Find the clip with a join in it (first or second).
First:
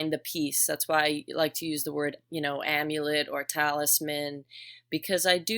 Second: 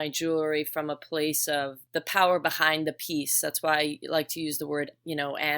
second